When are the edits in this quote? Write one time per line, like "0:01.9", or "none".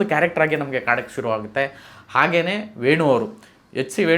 none